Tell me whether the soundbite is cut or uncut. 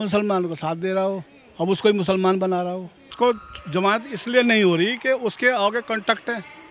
cut